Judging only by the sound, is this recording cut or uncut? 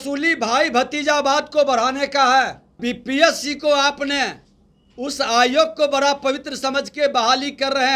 cut